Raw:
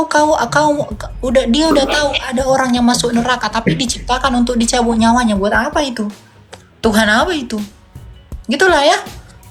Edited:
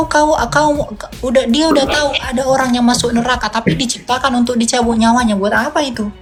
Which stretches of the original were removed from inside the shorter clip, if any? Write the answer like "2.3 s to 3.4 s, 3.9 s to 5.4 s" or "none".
none